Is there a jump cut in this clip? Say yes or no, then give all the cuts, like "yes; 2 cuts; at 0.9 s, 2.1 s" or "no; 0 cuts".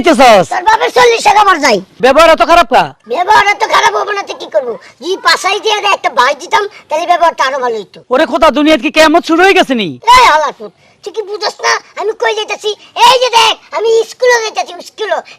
yes; 4 cuts; at 1.9 s, 3.0 s, 7.9 s, 9.9 s